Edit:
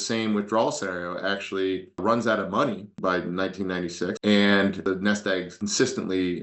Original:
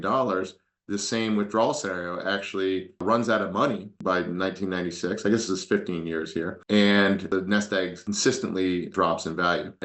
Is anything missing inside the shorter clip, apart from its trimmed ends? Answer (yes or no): yes